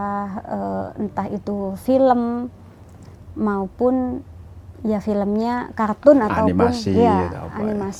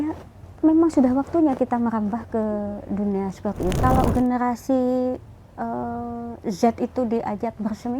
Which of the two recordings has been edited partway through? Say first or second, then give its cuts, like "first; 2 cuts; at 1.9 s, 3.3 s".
second; 1 cut; at 3.8 s